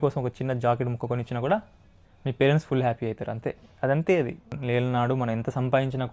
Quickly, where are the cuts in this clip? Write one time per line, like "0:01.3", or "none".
0:04.5